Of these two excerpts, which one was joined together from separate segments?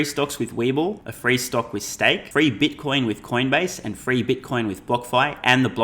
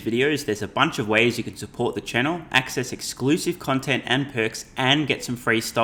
first; 2 cuts; at 1.1 s, 2.2 s

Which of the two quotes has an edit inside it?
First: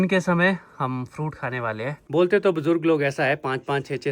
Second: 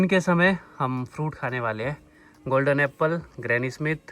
first; 1 cut; at 2.0 s

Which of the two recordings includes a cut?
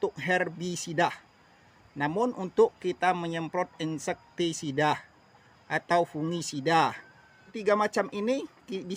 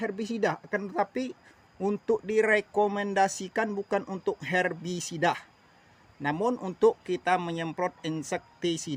first; 1 cut; at 7.6 s

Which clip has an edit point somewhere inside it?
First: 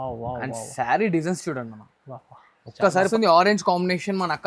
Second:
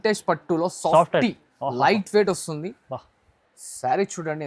first; 1 cut; at 3.1 s

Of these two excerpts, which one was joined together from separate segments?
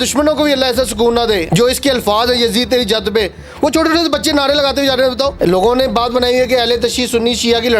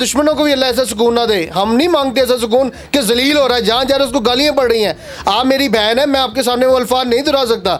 first; 2 cuts; at 1.4 s, 5.3 s

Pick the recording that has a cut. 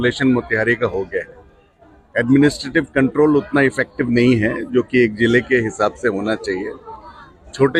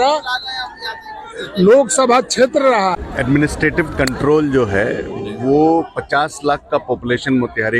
second; 1 cut; at 3.5 s

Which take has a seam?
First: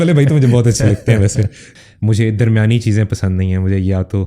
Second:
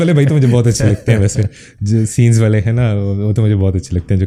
first; 1 cut; at 1.7 s

